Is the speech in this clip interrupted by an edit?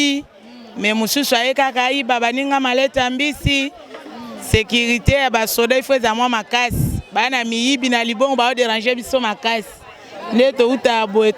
no; 0 cuts

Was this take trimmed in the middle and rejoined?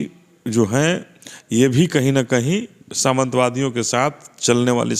no; 0 cuts

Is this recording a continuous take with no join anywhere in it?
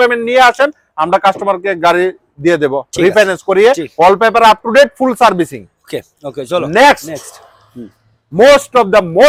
yes; 0 cuts

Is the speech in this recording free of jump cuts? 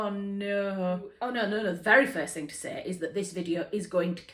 no; 1 cut; at 1.2 s

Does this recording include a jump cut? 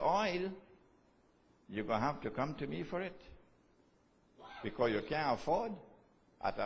yes; 1 cut; at 5.2 s

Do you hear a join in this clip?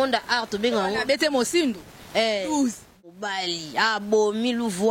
yes; 1 cut; at 3.1 s

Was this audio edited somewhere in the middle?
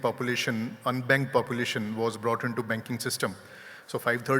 no; 0 cuts

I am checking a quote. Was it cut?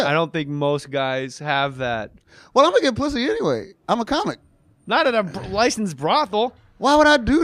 yes; 1 cut; at 4.5 s

